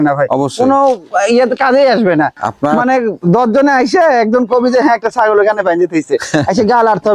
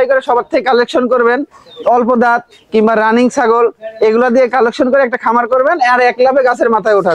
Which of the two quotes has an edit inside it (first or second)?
first